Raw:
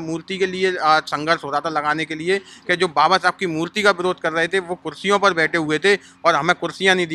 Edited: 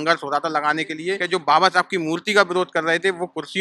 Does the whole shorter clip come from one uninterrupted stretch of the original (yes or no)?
no